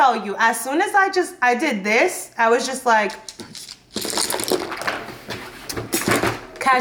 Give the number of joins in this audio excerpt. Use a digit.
0